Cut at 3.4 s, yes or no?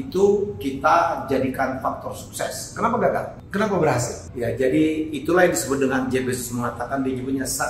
yes